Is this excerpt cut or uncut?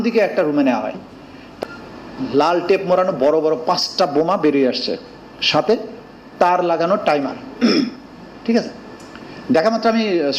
cut